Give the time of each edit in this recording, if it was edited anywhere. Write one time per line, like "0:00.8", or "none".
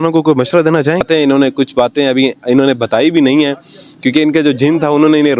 0:01.0